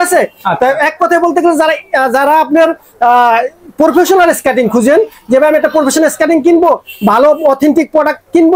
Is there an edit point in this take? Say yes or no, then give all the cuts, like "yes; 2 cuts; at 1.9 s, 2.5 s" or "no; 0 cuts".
no; 0 cuts